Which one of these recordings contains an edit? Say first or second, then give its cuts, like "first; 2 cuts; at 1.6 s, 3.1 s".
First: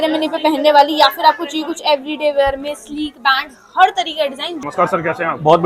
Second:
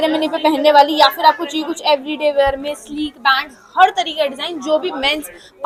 first; 1 cut; at 4.6 s